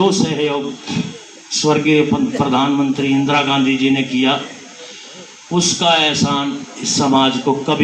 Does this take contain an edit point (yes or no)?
no